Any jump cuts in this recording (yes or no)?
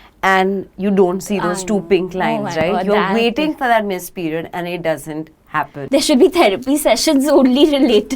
yes